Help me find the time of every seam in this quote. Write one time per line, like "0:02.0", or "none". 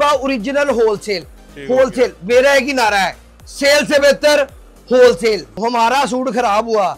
0:05.5